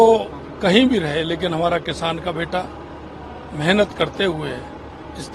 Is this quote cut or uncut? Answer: uncut